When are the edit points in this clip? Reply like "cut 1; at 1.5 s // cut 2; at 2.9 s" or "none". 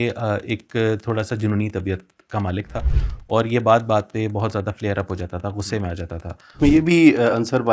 cut 1; at 6.6 s